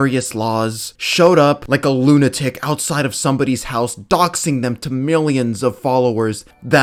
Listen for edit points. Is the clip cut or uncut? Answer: uncut